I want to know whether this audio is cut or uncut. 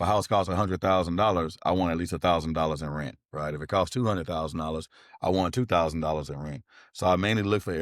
uncut